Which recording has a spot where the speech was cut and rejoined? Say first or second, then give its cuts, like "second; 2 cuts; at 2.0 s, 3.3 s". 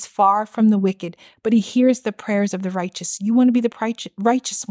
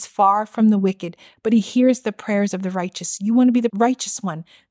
second; 1 cut; at 3.7 s